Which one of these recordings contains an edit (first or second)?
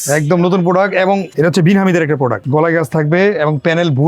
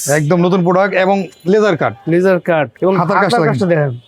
first